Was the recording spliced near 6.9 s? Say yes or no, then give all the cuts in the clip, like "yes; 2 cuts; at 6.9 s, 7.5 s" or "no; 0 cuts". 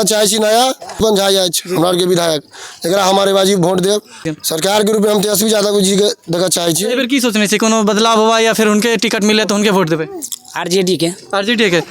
yes; 3 cuts; at 1.0 s, 4.3 s, 6.9 s